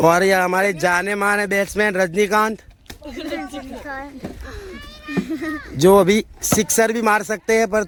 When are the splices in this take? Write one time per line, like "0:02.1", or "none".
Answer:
none